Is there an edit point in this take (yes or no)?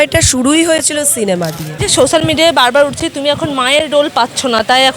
yes